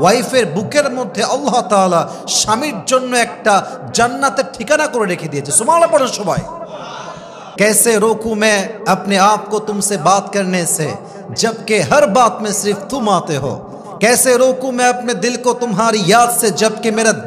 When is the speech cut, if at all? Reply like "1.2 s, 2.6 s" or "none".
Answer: 7.5 s